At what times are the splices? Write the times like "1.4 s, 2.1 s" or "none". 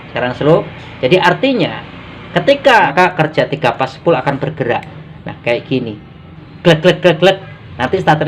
2.9 s